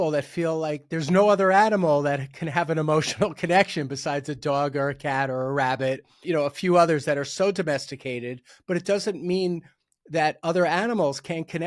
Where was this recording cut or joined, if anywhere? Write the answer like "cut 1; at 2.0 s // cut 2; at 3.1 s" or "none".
cut 1; at 6.2 s // cut 2; at 8.5 s